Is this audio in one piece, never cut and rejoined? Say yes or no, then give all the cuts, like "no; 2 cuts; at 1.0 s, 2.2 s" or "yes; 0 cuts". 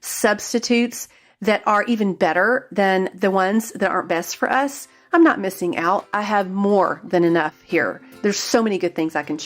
yes; 0 cuts